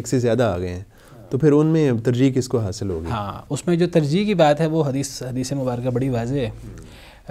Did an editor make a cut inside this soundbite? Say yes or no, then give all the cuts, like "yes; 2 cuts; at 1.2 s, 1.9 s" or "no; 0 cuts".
no; 0 cuts